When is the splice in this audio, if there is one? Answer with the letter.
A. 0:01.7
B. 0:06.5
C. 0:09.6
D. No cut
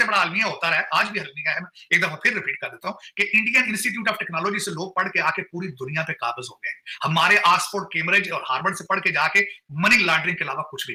D